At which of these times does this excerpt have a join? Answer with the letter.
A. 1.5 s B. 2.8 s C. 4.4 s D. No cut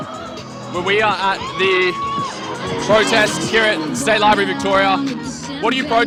D